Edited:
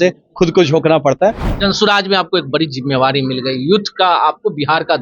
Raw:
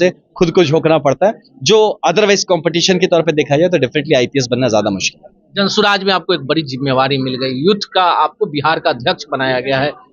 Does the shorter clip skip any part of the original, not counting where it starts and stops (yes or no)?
yes